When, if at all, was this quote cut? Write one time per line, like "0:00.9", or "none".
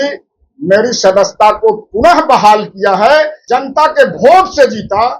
0:03.4